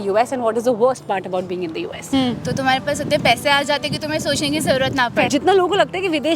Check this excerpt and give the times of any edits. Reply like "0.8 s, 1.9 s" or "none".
2.0 s, 5.3 s